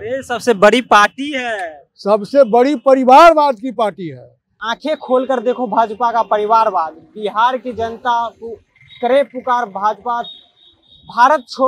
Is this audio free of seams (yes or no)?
no